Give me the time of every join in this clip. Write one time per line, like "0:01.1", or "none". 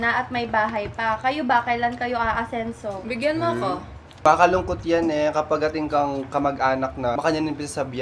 0:04.2
0:07.1